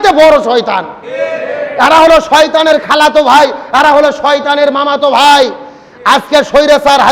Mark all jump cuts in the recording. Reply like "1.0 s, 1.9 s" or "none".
none